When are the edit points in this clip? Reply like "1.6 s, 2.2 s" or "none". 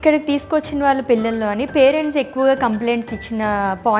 none